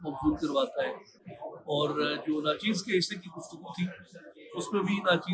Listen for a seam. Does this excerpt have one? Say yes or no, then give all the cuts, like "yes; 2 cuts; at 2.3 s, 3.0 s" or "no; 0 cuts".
no; 0 cuts